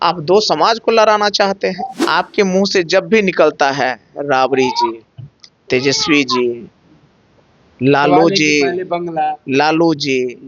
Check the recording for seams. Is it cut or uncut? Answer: cut